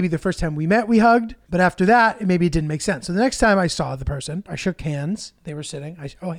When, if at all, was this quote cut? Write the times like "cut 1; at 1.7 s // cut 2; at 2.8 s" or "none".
cut 1; at 1.4 s // cut 2; at 4.5 s